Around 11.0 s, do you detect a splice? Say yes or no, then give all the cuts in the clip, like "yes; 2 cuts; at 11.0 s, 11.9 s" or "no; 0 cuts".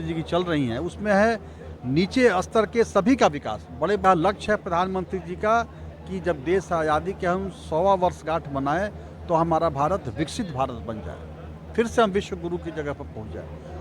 no; 1 cut; at 4.0 s